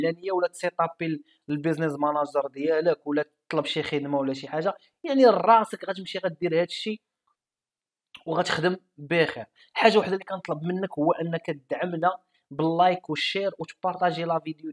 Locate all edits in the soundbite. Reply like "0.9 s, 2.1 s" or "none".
none